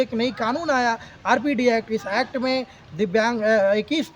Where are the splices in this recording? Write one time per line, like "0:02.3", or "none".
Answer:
none